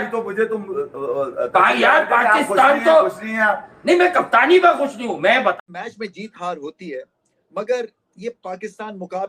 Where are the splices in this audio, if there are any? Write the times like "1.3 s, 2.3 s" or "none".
5.7 s